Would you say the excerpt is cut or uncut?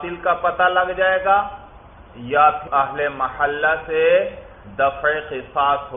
cut